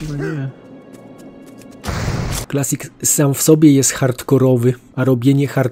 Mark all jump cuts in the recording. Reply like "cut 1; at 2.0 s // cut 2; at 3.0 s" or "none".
cut 1; at 2.4 s